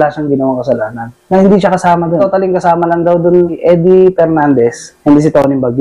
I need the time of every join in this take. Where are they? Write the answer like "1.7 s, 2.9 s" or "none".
1.1 s, 2.2 s, 3.6 s, 4.9 s